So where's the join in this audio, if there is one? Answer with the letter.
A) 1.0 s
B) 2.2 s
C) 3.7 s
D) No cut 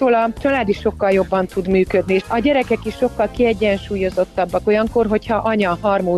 B